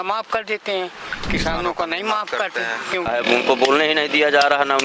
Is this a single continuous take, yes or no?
no